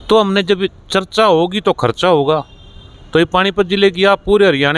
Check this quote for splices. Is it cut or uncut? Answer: uncut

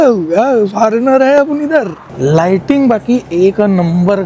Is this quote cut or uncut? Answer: cut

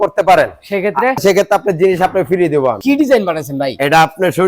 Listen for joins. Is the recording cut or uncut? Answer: cut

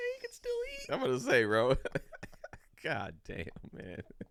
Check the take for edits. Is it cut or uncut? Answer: uncut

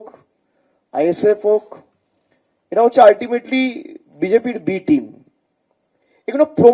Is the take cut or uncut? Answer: uncut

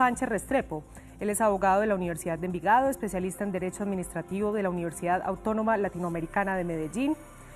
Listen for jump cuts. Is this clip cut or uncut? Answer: cut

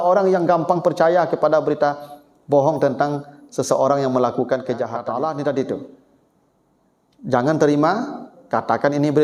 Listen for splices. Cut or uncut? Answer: cut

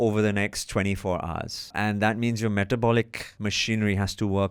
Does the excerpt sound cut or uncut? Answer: cut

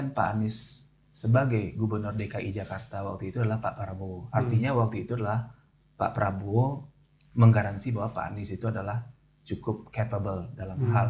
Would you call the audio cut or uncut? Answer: uncut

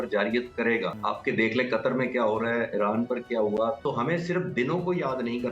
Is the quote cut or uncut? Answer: cut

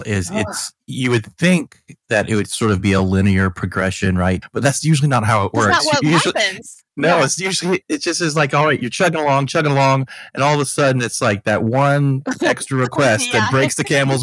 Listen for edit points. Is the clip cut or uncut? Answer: cut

